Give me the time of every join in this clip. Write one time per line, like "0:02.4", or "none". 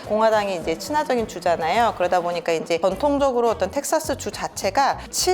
0:02.8